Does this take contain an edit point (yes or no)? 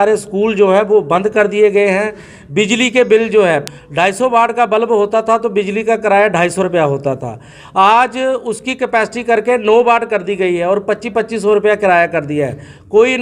yes